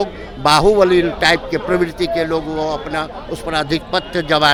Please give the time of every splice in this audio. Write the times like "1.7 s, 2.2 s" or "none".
none